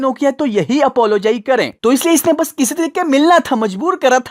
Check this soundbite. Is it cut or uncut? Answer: uncut